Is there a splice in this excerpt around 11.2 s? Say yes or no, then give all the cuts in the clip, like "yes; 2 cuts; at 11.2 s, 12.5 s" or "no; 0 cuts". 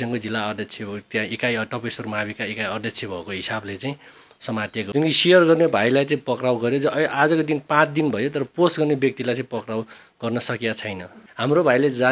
yes; 2 cuts; at 4.9 s, 11.2 s